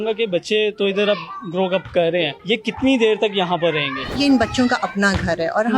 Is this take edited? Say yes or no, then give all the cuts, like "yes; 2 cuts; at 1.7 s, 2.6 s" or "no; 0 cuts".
yes; 2 cuts; at 2.4 s, 4.2 s